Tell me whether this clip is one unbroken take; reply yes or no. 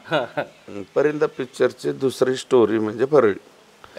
yes